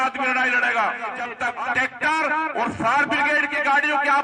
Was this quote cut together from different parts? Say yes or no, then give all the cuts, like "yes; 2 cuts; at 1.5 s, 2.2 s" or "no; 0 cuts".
yes; 1 cut; at 1.2 s